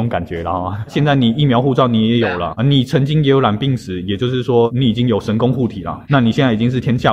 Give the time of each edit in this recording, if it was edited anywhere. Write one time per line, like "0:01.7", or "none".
0:00.9
0:02.5
0:04.7
0:05.9